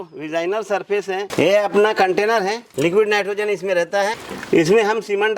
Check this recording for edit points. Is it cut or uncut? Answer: cut